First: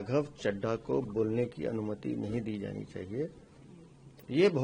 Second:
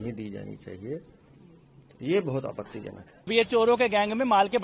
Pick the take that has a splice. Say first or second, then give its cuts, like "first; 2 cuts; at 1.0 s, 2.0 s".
second; 1 cut; at 3.3 s